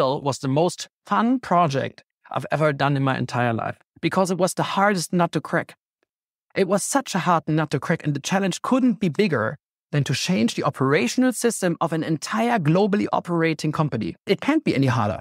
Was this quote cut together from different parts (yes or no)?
yes